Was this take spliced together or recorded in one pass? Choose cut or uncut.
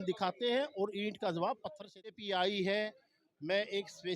cut